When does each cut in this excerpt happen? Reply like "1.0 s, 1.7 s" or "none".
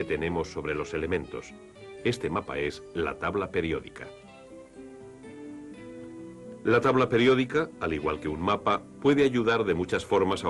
5.6 s